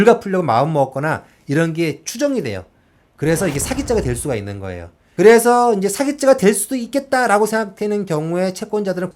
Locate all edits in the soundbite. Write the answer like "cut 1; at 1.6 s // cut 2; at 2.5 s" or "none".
none